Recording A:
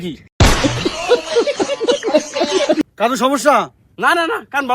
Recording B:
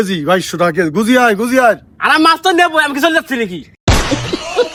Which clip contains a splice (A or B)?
A